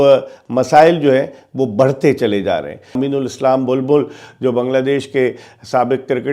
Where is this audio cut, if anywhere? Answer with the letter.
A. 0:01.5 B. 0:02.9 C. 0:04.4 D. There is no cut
B